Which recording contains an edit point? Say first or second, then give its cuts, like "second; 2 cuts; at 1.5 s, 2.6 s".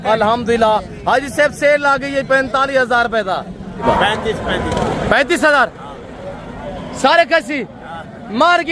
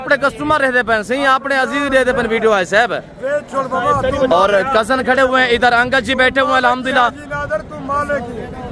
first; 1 cut; at 3.8 s